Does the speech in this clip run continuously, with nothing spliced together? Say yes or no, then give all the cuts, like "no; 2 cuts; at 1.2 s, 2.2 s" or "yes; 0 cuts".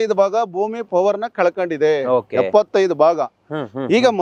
yes; 0 cuts